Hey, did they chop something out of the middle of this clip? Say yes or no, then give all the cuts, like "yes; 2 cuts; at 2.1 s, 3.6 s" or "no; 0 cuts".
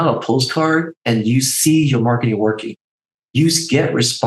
no; 0 cuts